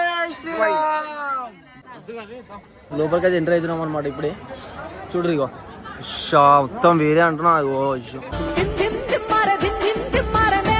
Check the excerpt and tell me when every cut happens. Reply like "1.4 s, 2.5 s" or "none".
none